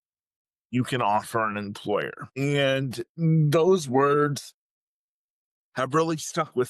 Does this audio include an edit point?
yes; 1 cut; at 2.2 s

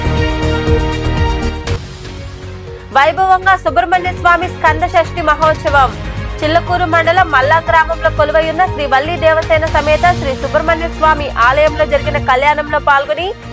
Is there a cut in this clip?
yes; 3 cuts; at 1.0 s, 1.8 s, 2.8 s

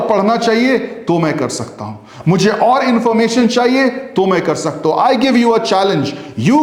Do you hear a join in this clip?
no; 0 cuts

